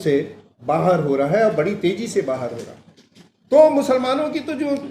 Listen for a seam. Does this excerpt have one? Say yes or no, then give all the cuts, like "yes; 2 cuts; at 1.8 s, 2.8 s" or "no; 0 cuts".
no; 0 cuts